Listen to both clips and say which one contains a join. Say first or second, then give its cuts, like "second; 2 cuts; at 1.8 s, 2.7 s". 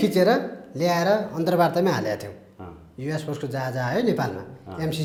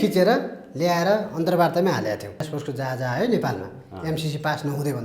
second; 1 cut; at 2.4 s